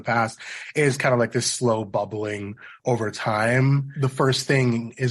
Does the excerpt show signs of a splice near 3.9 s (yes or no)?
yes